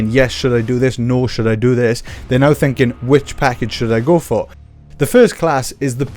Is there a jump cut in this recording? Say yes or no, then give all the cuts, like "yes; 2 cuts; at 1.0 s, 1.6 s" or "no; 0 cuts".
yes; 1 cut; at 4.6 s